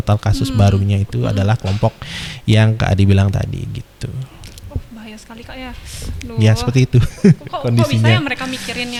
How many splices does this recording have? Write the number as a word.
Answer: zero